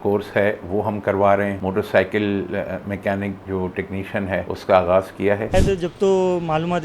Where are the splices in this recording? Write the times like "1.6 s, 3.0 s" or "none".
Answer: 1.6 s, 4.5 s, 5.5 s